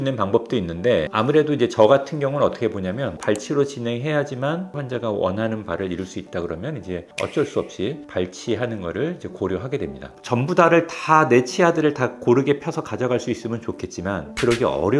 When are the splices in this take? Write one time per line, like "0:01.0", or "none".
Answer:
0:01.1
0:03.2
0:04.8
0:10.1